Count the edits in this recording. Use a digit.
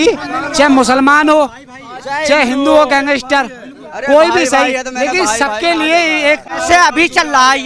1